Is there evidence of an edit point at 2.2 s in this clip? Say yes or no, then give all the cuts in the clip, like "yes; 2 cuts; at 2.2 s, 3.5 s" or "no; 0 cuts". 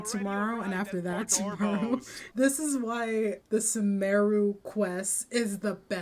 yes; 2 cuts; at 2.2 s, 3.4 s